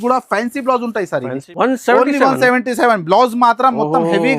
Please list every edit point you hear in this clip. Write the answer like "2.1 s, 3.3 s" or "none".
1.4 s